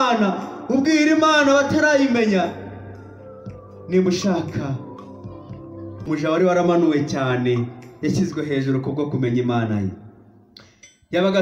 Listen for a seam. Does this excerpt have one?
yes; 1 cut; at 6.1 s

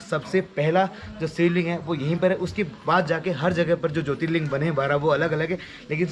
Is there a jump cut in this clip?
no; 0 cuts

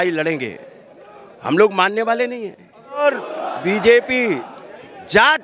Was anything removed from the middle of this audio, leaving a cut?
yes; 1 cut; at 3.0 s

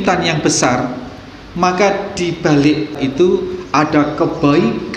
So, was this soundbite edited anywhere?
yes; 1 cut; at 3.0 s

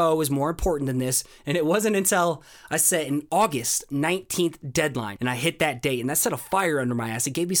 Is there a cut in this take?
yes; 1 cut; at 5.1 s

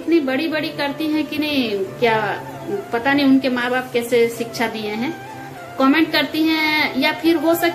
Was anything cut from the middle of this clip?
no; 0 cuts

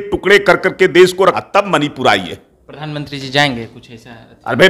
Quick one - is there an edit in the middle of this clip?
yes; 1 cut; at 1.4 s

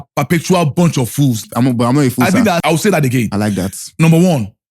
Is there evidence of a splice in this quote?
yes; 2 cuts; at 1.5 s, 2.6 s

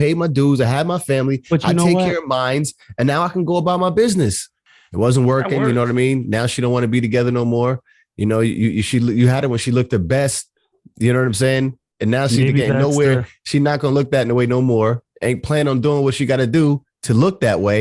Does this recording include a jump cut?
yes; 1 cut; at 4.6 s

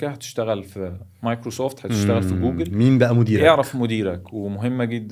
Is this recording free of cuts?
yes; 0 cuts

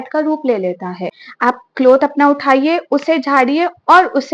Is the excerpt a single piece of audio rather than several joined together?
no; 1 cut; at 1.2 s

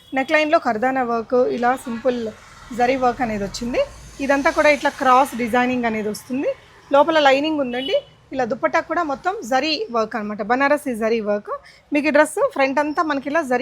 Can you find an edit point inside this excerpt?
no; 0 cuts

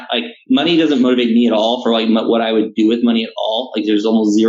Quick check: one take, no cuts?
yes; 0 cuts

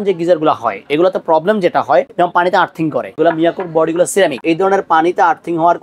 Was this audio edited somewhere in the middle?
yes; 3 cuts; at 2.1 s, 3.1 s, 4.4 s

